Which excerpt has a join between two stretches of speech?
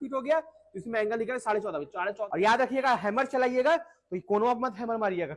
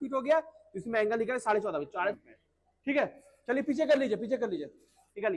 first; 1 cut; at 2.2 s

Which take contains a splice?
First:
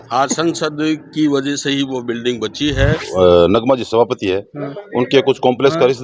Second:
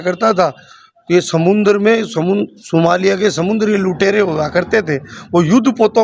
first; 1 cut; at 3.1 s

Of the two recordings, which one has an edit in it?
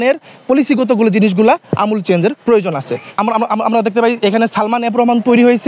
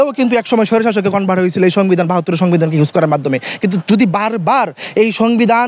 first; 1 cut; at 3.1 s

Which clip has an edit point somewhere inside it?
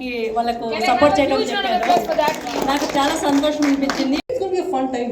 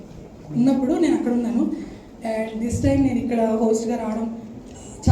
first; 1 cut; at 4.2 s

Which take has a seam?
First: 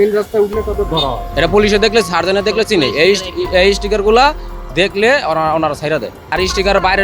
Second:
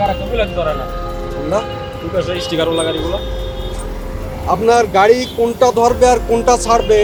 first; 2 cuts; at 1.2 s, 6.3 s

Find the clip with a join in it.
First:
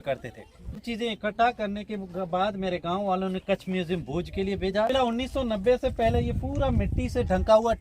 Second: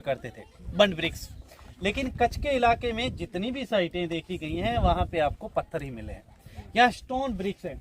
first; 2 cuts; at 0.8 s, 4.9 s

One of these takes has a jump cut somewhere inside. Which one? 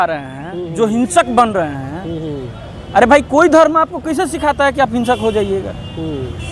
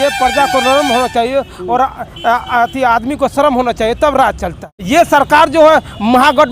second; 1 cut; at 4.7 s

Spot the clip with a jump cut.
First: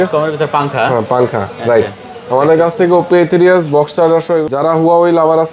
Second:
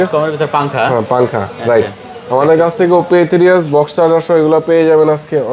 first; 1 cut; at 4.4 s

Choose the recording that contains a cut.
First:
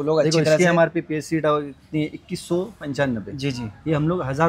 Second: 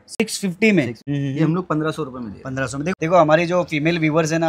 second; 2 cuts; at 1.0 s, 2.9 s

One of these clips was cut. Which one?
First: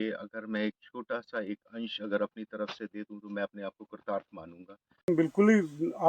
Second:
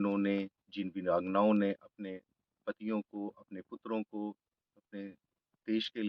first; 1 cut; at 5.1 s

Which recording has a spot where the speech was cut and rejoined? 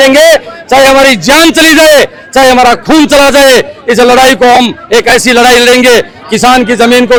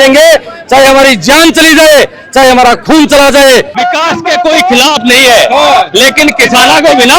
second; 1 cut; at 3.7 s

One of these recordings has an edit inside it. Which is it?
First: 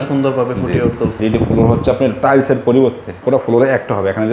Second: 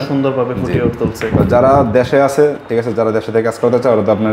first; 2 cuts; at 1.1 s, 3.1 s

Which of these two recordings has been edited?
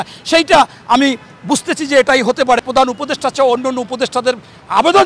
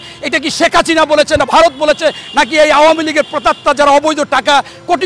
first; 1 cut; at 2.7 s

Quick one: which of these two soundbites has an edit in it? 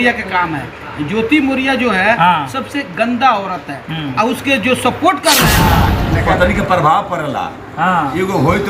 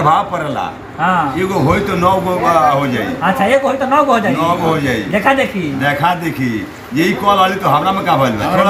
first; 1 cut; at 5.9 s

